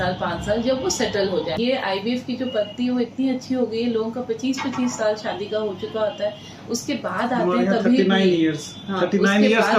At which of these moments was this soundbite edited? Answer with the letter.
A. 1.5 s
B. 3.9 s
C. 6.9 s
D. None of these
A